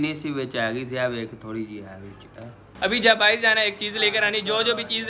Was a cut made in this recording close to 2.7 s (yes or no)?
yes